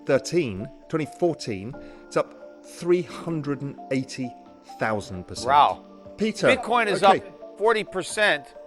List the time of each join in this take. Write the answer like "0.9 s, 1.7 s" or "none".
6.0 s